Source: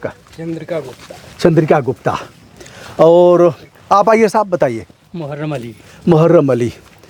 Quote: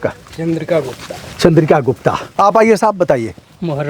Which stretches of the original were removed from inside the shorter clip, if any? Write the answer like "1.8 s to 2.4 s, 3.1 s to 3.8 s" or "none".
2.2 s to 3.7 s